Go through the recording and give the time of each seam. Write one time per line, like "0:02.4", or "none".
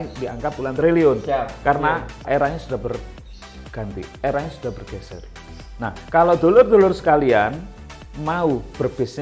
0:02.2